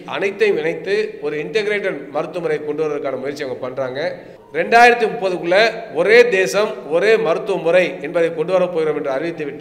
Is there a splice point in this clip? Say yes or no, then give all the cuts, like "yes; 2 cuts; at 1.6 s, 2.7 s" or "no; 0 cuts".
yes; 1 cut; at 4.3 s